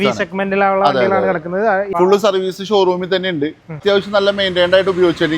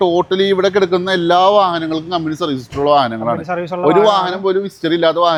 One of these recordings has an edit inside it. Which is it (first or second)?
first